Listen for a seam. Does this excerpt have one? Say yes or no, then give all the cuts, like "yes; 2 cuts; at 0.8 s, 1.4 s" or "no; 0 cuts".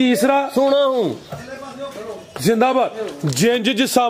no; 0 cuts